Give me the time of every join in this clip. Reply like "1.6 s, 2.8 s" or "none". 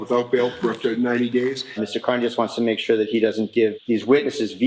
1.8 s, 3.8 s